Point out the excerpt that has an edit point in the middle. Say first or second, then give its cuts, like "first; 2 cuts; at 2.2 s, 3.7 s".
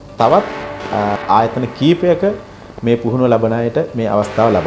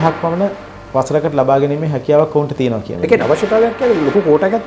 second; 1 cut; at 2.9 s